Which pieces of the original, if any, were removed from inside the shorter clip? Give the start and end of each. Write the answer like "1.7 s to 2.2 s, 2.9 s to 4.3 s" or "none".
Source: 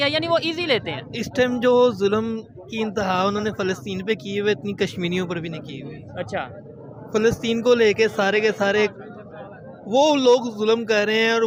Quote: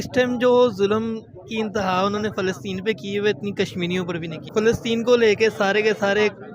5.6 s to 7.0 s

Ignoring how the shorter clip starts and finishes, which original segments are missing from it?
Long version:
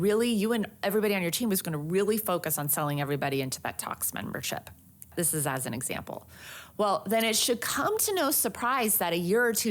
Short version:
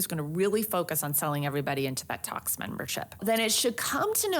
4.7 s to 7.0 s

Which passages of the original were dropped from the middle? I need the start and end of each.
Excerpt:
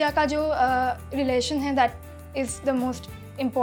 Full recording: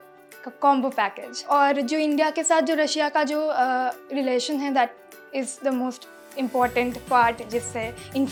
none

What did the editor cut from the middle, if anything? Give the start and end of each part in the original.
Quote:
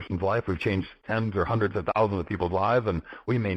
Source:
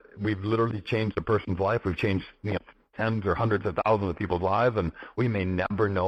2.3 s to 2.8 s

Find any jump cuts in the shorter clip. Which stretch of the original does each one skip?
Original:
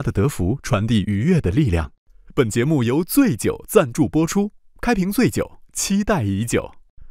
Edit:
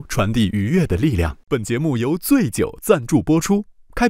1.9 s to 2.2 s

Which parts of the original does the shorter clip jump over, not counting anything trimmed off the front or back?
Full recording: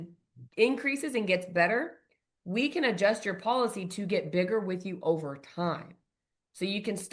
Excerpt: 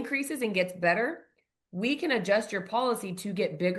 none

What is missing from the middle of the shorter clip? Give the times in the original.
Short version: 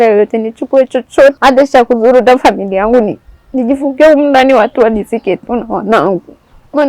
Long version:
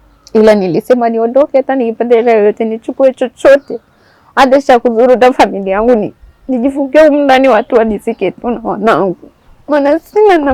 3.6 s to 4.3 s

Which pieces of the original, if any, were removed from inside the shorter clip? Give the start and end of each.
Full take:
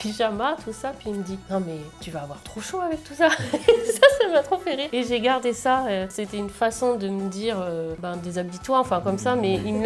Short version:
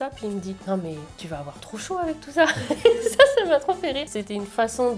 4.9 s to 6.1 s

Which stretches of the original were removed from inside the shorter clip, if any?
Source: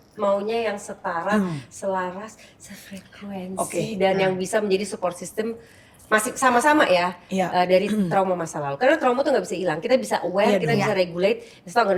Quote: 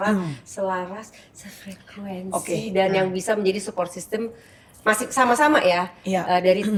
none

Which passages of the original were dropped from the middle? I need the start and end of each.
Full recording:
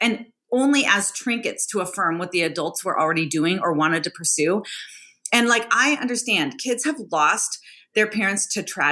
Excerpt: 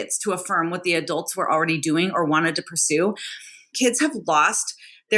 5.2 s to 6.6 s

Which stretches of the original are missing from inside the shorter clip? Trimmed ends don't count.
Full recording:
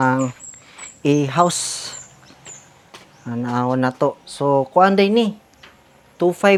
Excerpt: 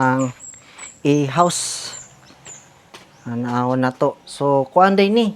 none

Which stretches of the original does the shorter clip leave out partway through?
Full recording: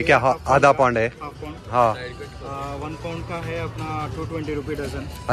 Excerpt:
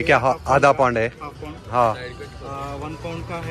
none

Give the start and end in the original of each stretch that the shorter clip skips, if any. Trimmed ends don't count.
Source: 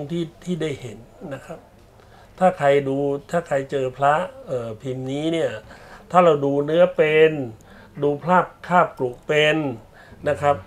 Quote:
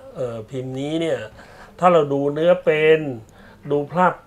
none

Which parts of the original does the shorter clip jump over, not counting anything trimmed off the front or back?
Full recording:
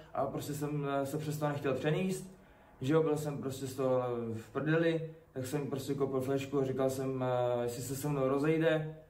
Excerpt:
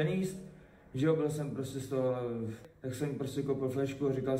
4.5 s to 5.1 s

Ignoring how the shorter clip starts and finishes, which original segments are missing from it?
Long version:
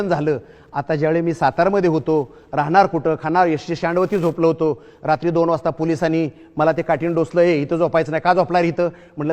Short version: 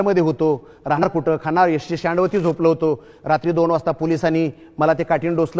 2.7 s to 2.8 s

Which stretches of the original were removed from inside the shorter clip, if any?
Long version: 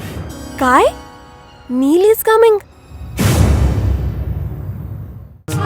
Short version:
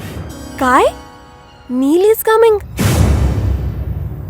2.7 s to 3.1 s

